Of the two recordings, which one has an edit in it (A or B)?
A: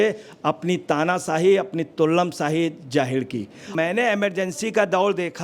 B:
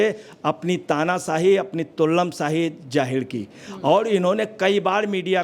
A